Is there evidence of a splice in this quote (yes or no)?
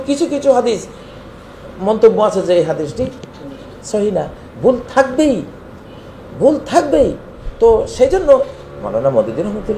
no